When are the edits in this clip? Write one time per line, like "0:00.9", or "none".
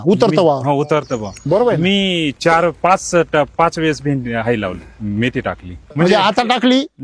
0:05.9